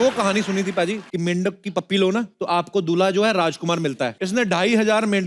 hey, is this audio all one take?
no; 3 cuts; at 1.1 s, 2.3 s, 4.2 s

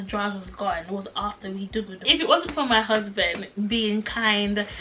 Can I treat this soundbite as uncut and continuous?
no; 1 cut; at 2.0 s

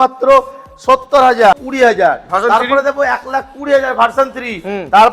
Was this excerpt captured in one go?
no; 1 cut; at 1.5 s

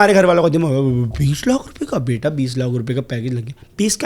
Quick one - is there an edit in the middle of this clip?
no; 0 cuts

